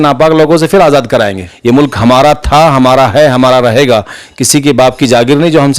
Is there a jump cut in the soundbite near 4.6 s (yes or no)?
no